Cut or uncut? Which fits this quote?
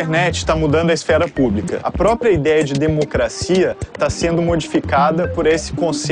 cut